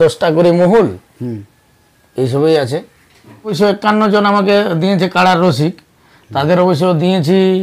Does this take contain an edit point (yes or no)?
yes